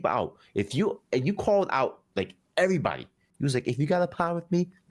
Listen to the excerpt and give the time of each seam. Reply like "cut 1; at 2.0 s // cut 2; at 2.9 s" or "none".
none